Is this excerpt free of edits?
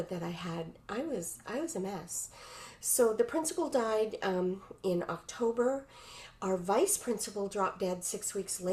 yes; 0 cuts

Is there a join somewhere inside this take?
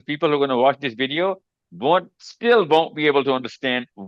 no; 0 cuts

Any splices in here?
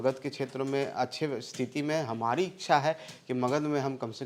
no; 0 cuts

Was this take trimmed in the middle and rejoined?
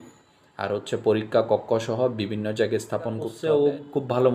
yes; 1 cut; at 3.3 s

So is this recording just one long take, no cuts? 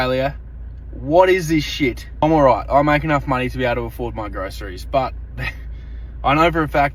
yes; 0 cuts

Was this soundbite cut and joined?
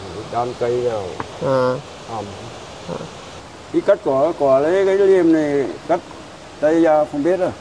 yes; 1 cut; at 3.3 s

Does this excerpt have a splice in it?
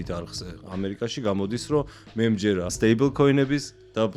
yes; 1 cut; at 2.8 s

